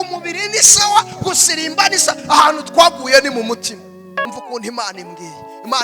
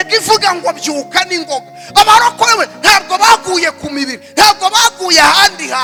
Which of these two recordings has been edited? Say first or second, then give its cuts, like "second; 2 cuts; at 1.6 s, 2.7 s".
first; 1 cut; at 4.3 s